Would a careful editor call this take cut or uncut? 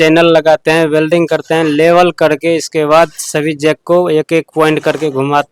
uncut